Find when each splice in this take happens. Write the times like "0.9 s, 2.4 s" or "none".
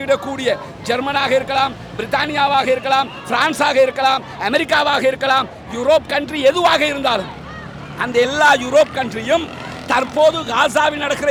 none